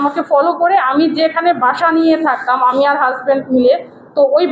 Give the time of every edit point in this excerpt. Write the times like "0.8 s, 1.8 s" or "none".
none